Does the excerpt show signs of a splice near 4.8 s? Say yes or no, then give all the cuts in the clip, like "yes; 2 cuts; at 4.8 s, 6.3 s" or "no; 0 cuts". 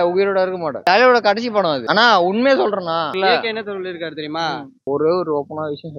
yes; 1 cut; at 4.8 s